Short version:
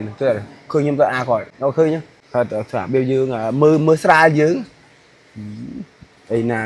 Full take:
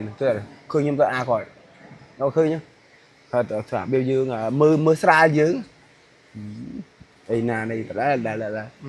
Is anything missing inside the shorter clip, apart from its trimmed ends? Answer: yes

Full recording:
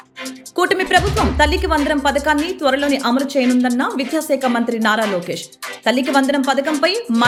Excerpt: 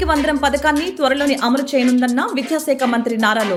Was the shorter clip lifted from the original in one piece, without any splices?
yes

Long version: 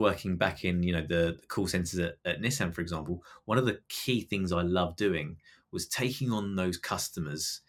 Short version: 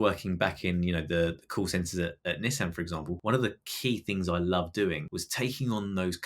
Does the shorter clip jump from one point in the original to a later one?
yes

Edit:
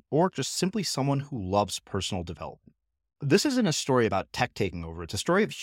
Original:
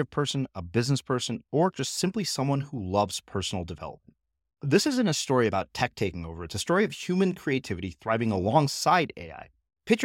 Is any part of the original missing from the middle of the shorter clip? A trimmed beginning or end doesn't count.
no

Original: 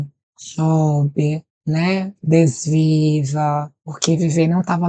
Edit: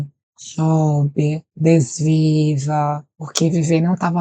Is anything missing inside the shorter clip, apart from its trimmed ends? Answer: yes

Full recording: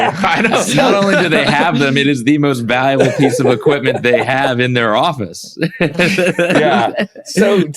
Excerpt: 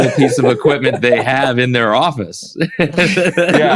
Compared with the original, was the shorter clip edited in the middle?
no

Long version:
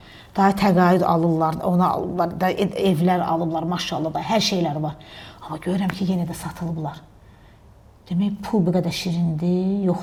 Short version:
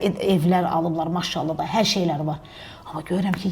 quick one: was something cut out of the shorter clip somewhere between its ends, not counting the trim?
no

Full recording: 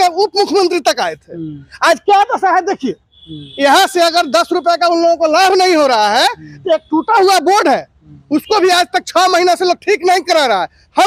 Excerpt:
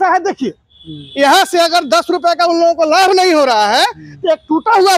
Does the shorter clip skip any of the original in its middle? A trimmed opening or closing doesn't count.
no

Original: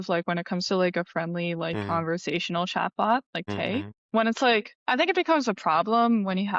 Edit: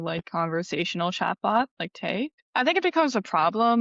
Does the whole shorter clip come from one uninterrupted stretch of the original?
no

